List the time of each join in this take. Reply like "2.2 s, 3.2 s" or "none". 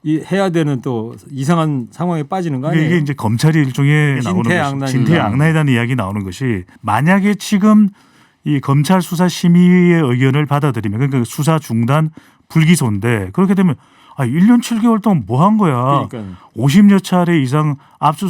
4.2 s, 6.7 s

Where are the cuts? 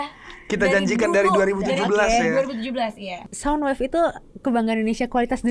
3.2 s

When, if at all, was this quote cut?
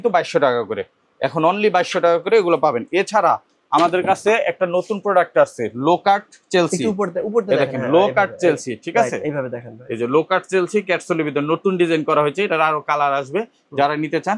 none

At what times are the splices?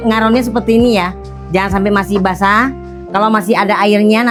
none

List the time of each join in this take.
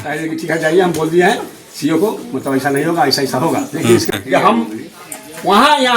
4.1 s

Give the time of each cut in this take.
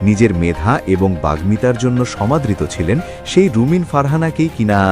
3.2 s

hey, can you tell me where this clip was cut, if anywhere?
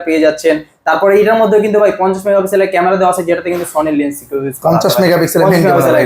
none

